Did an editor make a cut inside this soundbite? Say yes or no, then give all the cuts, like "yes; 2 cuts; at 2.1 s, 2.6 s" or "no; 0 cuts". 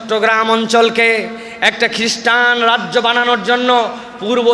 no; 0 cuts